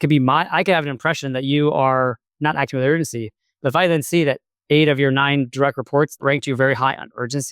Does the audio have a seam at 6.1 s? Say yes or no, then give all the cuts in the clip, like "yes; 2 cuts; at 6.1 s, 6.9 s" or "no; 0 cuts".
yes; 1 cut; at 6.1 s